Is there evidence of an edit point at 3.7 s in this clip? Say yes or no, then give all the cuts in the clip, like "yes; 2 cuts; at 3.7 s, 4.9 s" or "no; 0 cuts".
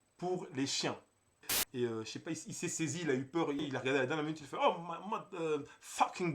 yes; 2 cuts; at 1.6 s, 3.7 s